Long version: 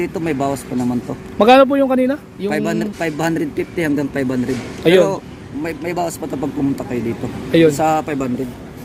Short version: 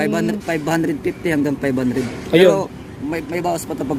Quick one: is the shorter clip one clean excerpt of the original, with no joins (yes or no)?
yes